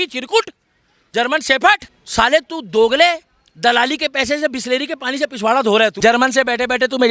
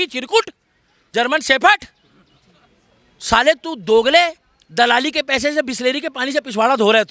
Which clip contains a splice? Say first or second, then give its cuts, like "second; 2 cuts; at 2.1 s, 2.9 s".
first; 2 cuts; at 2.0 s, 5.9 s